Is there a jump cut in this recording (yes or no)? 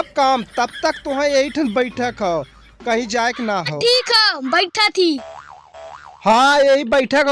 yes